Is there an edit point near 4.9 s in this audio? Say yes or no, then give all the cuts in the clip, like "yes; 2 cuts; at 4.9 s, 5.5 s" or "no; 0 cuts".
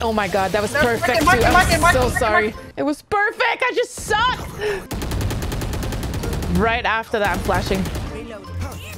yes; 2 cuts; at 2.6 s, 4.9 s